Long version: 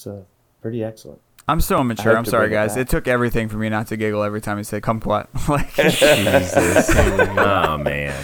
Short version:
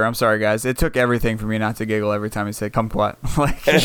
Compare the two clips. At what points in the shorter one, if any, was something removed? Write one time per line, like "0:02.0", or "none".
none

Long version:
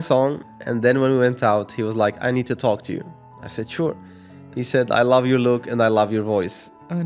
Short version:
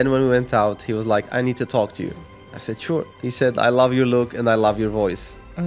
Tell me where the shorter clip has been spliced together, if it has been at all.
0:03.1

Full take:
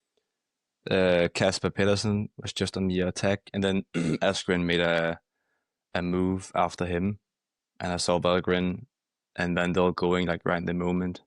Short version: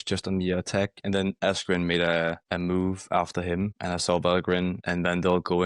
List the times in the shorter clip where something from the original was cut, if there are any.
0:01.4
0:02.4
0:03.8
0:04.8

